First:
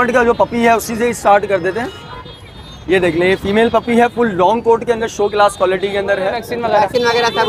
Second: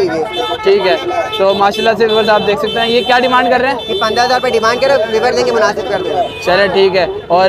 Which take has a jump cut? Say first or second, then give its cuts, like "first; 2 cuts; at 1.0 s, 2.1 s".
first; 1 cut; at 6.5 s